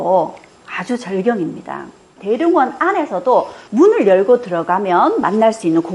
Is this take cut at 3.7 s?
no; 1 cut; at 2.2 s

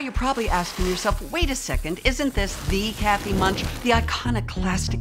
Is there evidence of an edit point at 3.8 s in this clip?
no; 0 cuts

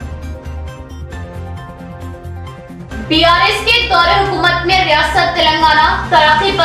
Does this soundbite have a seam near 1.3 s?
yes; 1 cut; at 1.3 s

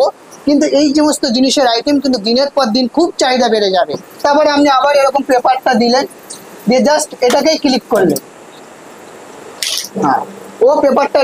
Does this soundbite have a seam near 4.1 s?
yes; 1 cut; at 4.1 s

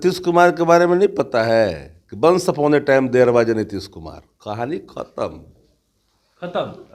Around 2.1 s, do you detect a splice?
no; 0 cuts

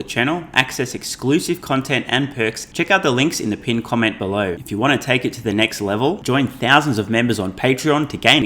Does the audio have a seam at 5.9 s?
no; 2 cuts; at 2.6 s, 4.6 s

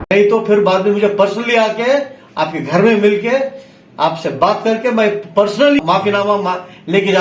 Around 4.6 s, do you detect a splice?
no; 1 cut; at 5.8 s

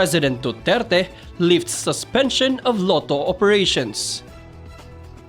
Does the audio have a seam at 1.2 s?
no; 1 cut; at 4.0 s

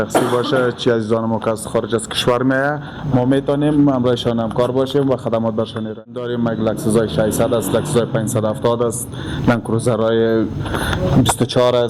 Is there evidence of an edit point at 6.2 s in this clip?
yes; 1 cut; at 6.2 s

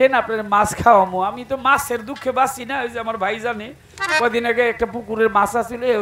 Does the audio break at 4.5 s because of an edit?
no; 0 cuts

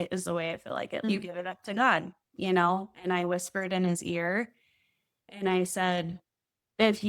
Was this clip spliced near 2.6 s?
no; 1 cut; at 1.0 s

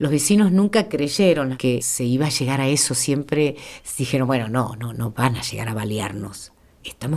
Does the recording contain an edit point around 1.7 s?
yes; 1 cut; at 1.7 s

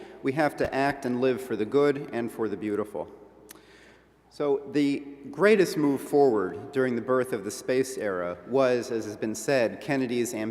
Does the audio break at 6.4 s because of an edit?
no; 1 cut; at 9.1 s

